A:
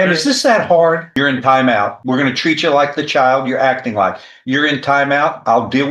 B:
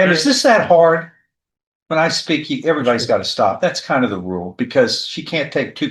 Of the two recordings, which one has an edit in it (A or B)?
A